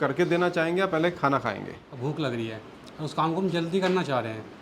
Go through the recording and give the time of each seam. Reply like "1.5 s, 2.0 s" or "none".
1.8 s